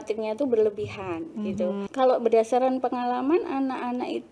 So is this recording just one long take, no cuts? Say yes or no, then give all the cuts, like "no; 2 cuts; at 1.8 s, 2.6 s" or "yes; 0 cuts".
no; 1 cut; at 1.8 s